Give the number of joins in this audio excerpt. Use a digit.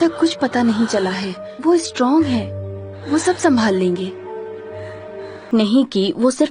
1